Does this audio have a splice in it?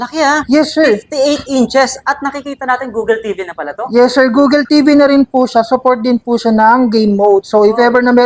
no; 0 cuts

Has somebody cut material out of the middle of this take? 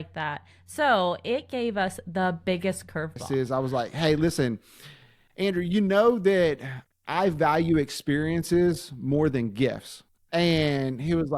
yes; 1 cut; at 3.2 s

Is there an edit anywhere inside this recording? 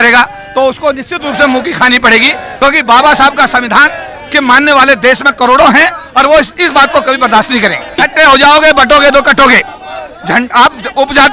yes; 2 cuts; at 2.4 s, 8.0 s

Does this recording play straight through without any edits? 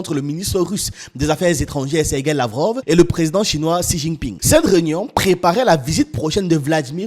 no; 1 cut; at 4.3 s

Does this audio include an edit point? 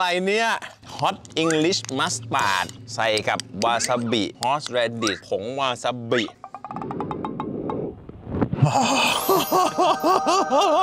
no; 0 cuts

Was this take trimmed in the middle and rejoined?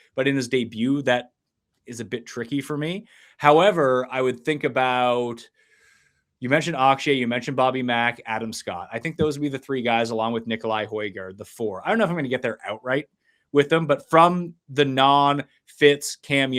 no; 0 cuts

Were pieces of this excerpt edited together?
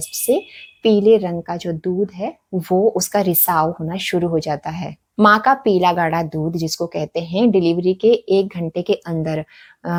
no; 0 cuts

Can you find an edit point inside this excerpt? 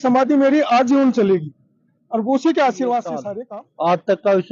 yes; 1 cut; at 3.3 s

